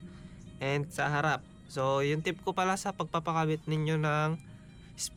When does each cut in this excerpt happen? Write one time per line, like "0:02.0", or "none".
none

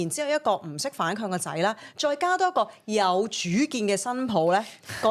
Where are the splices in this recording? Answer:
none

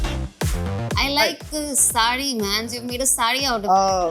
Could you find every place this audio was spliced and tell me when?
0:00.9

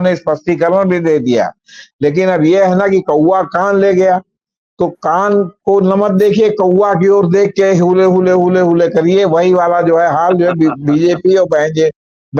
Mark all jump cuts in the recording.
none

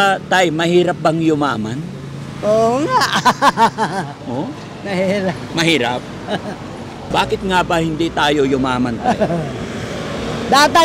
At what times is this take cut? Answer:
0:07.0

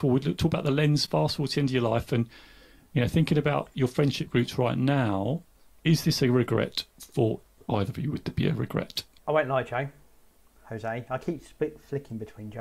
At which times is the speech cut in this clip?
0:07.5
0:09.0

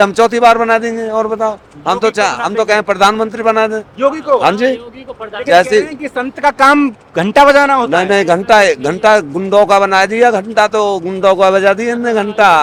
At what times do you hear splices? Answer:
none

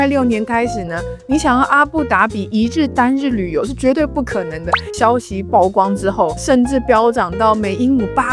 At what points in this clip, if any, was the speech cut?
0:04.9
0:06.4

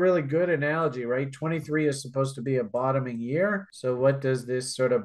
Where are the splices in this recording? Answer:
none

